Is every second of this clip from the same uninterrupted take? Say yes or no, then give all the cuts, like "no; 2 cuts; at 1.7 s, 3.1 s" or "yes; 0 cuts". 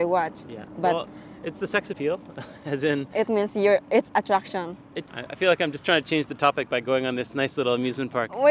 no; 2 cuts; at 2.0 s, 5.1 s